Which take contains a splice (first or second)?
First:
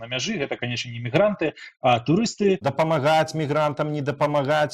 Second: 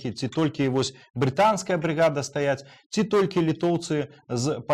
first